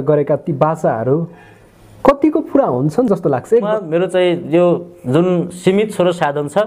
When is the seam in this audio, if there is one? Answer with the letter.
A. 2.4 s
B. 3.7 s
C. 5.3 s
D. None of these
B